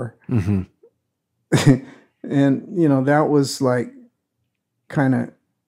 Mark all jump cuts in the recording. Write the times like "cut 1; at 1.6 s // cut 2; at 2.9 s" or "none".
none